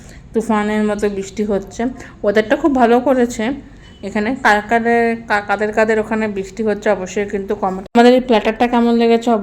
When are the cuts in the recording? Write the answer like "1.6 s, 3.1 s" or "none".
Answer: 7.9 s